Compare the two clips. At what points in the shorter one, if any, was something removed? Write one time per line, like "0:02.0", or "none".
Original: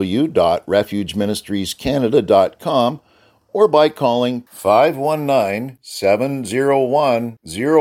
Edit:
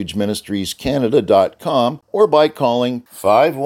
0:02.0